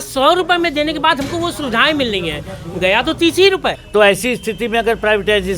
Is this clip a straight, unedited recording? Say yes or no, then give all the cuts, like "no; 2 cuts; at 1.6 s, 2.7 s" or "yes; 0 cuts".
no; 1 cut; at 3.8 s